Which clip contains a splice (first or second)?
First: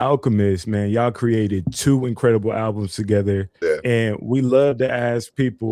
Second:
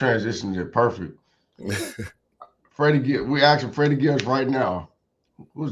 first